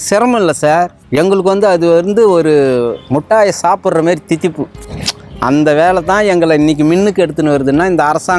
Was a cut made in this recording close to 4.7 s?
no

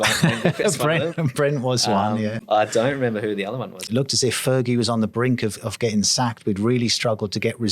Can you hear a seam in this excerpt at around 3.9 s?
yes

